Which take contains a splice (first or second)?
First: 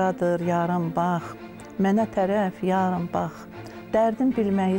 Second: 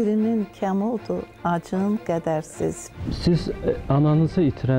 second